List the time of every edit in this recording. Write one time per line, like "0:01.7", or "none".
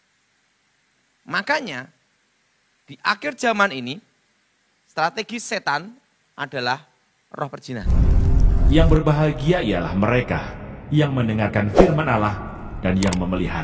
0:07.8